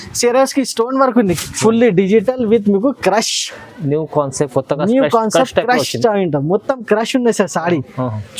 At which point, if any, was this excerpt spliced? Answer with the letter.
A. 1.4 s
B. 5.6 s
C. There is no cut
A